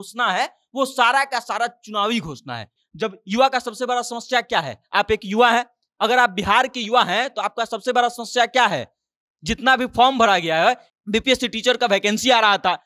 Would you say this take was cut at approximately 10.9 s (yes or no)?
yes